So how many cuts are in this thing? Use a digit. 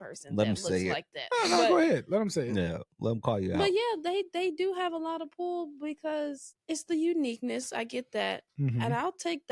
1